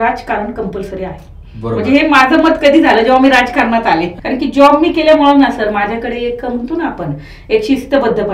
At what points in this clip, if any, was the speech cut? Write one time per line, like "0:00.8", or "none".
0:04.2